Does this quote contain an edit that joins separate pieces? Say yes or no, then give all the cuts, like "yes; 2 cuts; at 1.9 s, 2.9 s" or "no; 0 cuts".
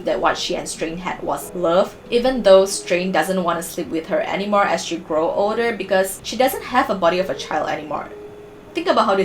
yes; 2 cuts; at 1.8 s, 6.2 s